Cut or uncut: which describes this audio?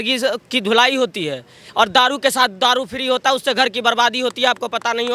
uncut